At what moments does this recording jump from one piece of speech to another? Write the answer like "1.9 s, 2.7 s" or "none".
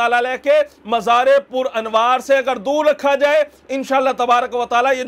none

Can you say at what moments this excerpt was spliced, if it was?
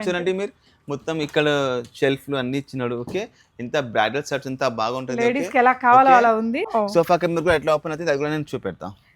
6.6 s

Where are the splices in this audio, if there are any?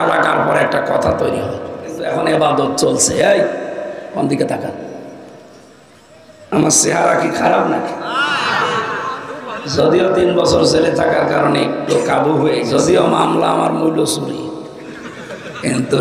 2.0 s, 12.7 s

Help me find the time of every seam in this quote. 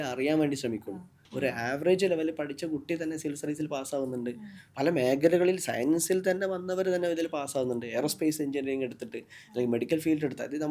1.2 s

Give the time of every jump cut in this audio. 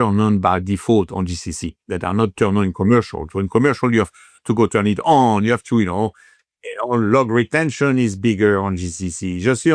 none

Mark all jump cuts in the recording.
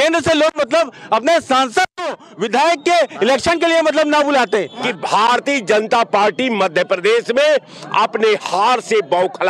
4.8 s

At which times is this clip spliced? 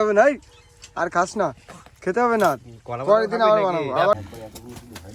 4.1 s

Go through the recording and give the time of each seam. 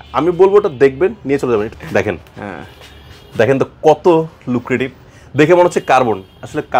1.7 s

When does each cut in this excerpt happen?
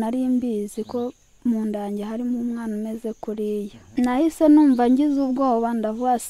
3.8 s

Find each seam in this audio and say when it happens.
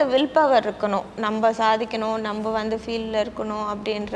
none

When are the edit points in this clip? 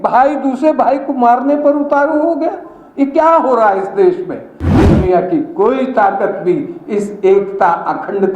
4.7 s

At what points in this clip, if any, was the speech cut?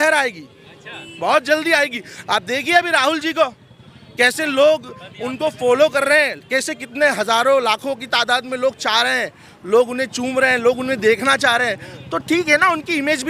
none

